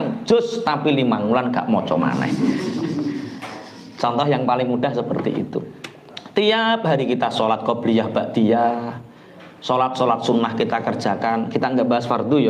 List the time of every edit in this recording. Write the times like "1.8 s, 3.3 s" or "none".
none